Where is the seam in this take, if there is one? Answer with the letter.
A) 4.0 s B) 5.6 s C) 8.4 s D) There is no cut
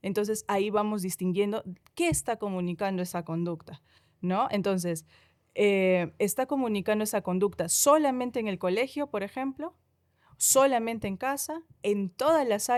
D